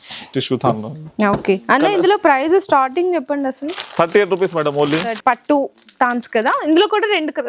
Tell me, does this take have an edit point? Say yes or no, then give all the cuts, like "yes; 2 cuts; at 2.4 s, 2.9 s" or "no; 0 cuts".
yes; 1 cut; at 5.2 s